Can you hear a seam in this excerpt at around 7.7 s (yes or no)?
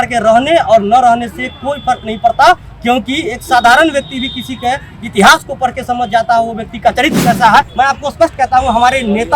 yes